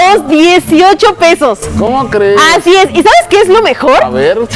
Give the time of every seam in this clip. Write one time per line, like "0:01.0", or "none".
none